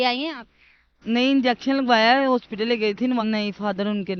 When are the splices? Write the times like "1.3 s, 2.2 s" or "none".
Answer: 3.2 s